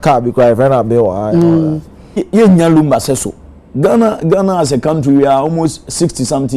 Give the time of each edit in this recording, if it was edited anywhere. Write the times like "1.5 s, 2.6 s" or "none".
2.2 s